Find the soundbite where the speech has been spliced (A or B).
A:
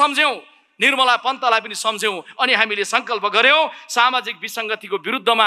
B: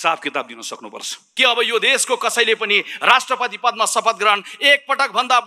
B